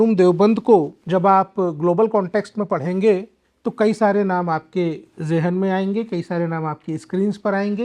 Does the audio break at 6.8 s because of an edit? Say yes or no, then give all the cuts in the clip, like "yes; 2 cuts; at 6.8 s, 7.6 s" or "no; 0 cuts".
no; 1 cut; at 1.0 s